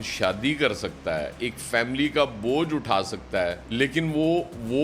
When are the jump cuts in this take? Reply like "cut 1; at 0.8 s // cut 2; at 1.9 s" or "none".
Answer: none